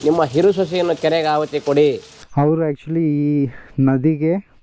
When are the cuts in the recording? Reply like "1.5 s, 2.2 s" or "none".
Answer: 2.2 s